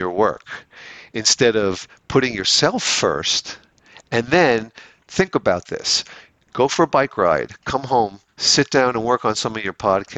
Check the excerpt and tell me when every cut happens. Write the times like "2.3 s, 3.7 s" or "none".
none